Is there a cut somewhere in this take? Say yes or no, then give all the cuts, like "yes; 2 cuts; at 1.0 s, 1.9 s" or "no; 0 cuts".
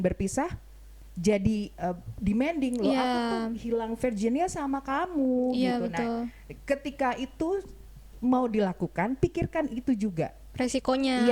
no; 0 cuts